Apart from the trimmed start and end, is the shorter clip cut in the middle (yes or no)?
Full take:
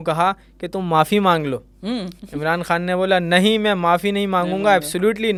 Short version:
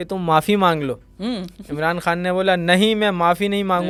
no